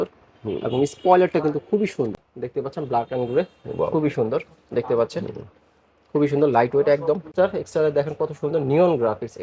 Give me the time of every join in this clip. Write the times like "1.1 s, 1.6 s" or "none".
2.2 s, 7.3 s